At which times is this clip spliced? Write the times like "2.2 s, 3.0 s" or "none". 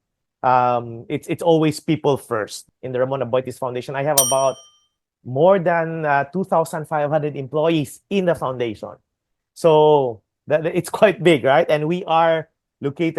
2.6 s